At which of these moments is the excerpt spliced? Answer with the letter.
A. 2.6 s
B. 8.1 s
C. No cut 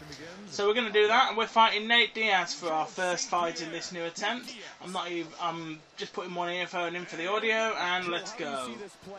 B